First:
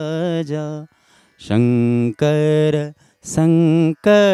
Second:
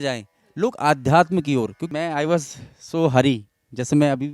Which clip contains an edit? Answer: second; 1 cut; at 1.8 s

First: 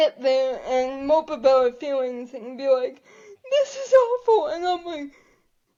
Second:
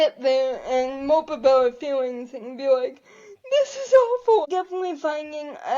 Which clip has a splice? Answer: second; 1 cut; at 4.5 s

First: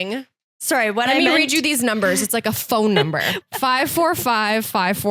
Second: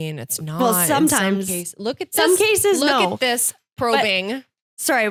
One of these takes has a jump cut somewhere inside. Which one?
first; 1 cut; at 3.3 s

